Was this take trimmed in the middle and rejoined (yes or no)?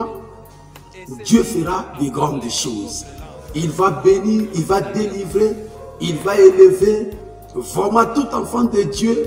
no